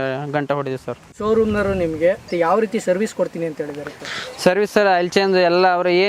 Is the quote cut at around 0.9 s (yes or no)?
no